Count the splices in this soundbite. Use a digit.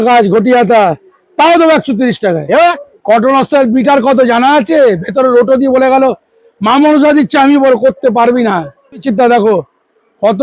2